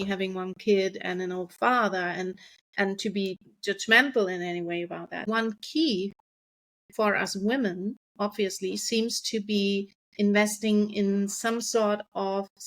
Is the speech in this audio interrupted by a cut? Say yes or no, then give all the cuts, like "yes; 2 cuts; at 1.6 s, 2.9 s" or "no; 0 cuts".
yes; 1 cut; at 5.2 s